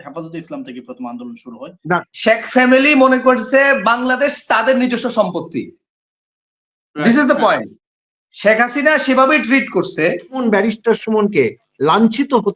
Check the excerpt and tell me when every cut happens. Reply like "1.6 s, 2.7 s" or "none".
2.0 s, 10.4 s